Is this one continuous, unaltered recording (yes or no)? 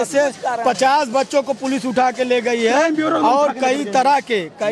yes